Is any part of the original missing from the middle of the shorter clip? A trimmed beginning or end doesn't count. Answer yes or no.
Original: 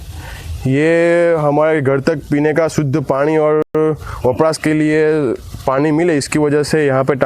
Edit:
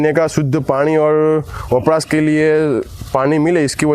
yes